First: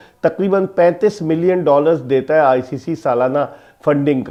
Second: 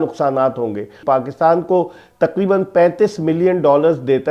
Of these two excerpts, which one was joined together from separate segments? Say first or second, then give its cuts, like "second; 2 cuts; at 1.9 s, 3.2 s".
second; 1 cut; at 1.0 s